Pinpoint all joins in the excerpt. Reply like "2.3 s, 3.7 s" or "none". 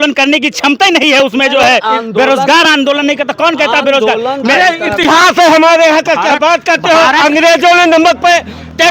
none